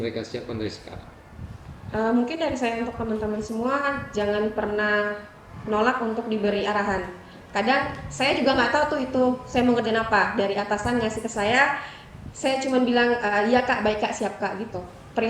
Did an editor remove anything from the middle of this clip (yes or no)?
no